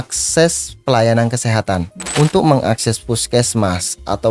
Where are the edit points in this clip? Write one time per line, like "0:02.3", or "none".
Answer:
0:02.0